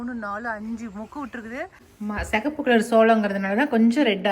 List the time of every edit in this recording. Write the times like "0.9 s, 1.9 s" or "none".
1.8 s